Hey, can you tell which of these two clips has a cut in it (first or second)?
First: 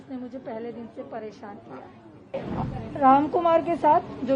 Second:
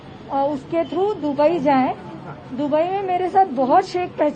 first